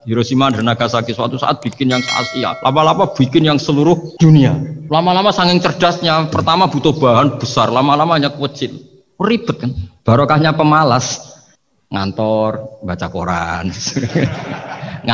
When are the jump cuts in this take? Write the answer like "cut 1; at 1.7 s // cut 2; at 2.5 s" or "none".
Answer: cut 1; at 2.6 s // cut 2; at 4.1 s // cut 3; at 4.7 s

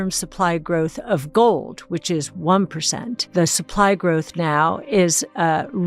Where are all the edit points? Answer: cut 1; at 3.2 s

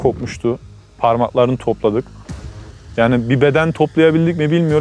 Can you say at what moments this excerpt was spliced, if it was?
none

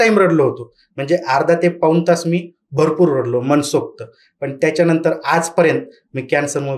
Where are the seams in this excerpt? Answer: none

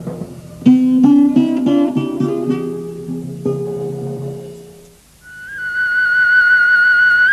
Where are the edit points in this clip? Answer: none

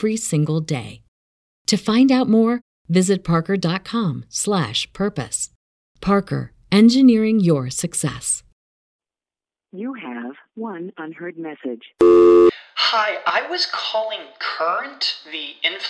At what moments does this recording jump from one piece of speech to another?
cut 1; at 9.0 s

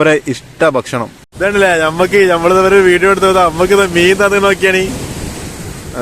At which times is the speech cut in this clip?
cut 1; at 1.2 s

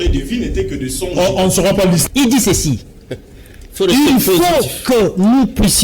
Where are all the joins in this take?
cut 1; at 2.0 s

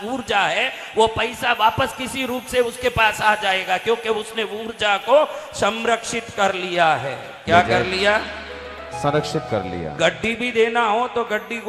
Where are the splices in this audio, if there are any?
none

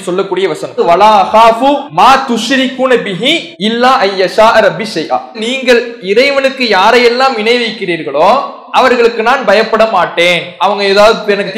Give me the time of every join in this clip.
cut 1; at 0.8 s // cut 2; at 1.9 s // cut 3; at 3.5 s

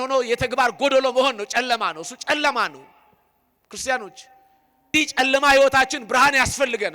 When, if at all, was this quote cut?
cut 1; at 4.9 s

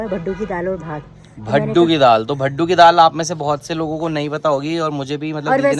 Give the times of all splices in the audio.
none

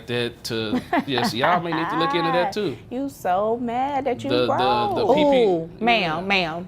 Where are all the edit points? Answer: none

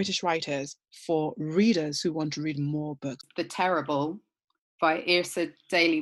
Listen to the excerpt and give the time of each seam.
cut 1; at 3.2 s

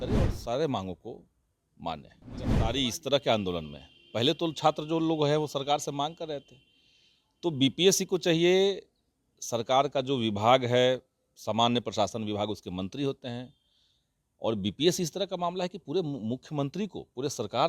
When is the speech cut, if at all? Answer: cut 1; at 2.6 s

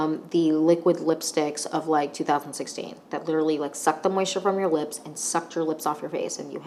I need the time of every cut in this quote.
none

